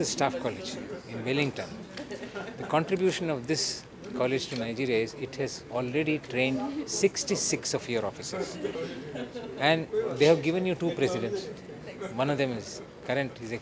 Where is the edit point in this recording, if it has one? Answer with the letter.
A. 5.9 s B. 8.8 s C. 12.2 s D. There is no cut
B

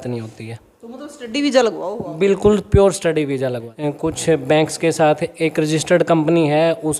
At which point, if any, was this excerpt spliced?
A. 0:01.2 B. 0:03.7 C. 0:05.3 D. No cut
B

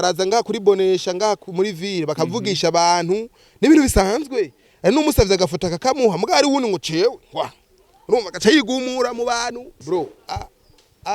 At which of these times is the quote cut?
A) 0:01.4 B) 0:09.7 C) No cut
B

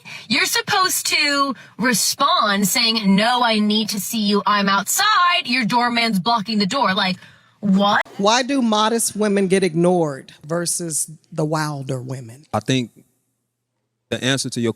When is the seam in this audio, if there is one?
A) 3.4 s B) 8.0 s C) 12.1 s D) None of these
B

